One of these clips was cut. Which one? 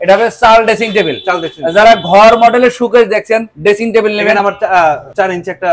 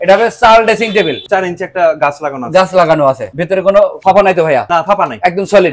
second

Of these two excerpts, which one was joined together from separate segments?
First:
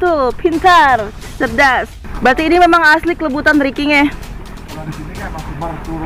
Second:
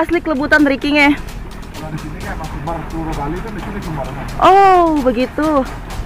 first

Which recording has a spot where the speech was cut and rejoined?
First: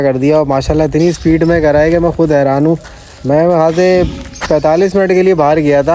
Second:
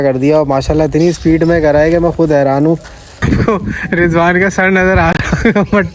second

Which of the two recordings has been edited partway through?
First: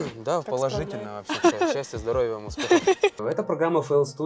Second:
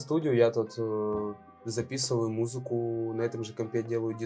first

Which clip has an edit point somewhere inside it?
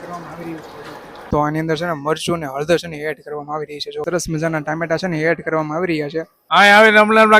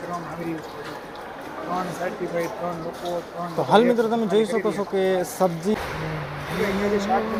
first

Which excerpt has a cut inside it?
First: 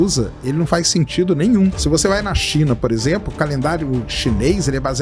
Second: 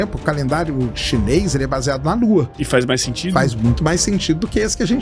first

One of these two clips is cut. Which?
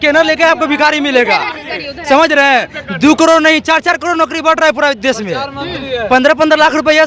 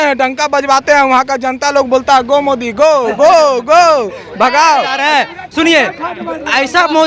second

